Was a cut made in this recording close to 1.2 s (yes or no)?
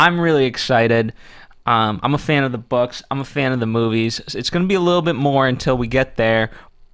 yes